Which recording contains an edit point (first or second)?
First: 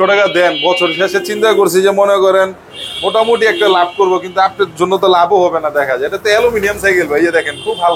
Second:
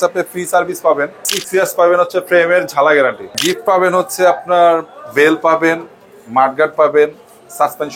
second